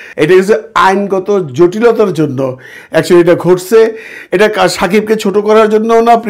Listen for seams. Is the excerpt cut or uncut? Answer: uncut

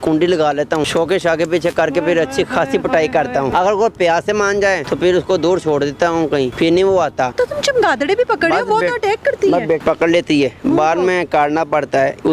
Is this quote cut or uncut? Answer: cut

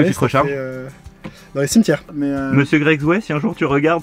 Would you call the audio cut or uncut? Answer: cut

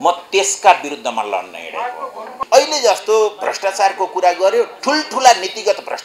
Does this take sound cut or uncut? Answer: cut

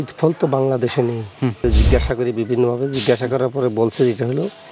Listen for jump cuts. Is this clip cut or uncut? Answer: cut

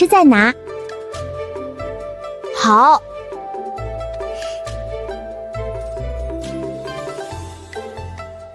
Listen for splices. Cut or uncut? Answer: uncut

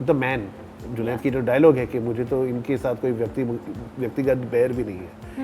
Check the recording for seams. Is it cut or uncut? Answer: uncut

